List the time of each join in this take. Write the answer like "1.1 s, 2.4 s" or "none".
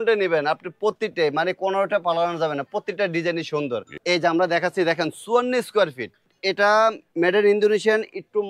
3.9 s, 6.3 s

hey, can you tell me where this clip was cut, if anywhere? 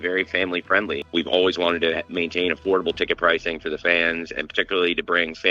1.0 s

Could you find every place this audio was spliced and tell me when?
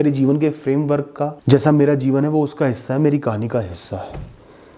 1.4 s

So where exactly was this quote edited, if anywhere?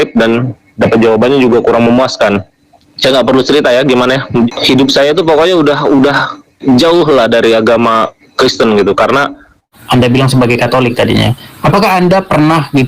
4.5 s, 9.8 s

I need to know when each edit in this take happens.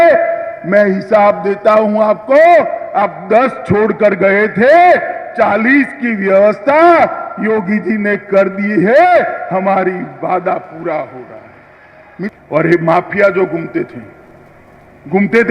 12.3 s

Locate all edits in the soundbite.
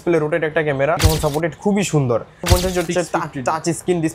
1.0 s, 2.4 s

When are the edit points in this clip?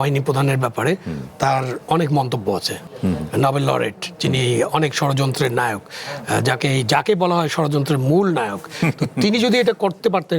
2.8 s

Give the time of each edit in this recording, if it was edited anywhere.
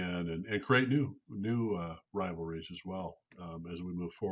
none

